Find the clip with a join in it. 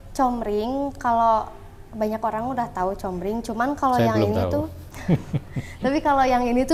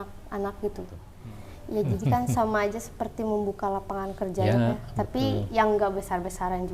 second; 1 cut; at 1.0 s

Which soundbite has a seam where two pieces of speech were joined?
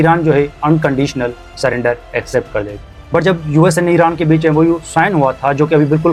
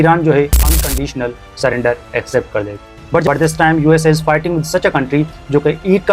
second; 1 cut; at 3.3 s

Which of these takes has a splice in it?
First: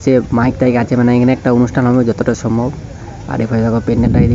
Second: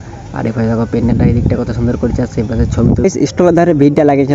second; 1 cut; at 3.0 s

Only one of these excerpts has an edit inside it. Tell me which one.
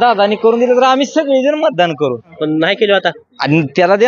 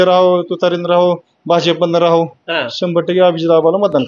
first; 1 cut; at 2.3 s

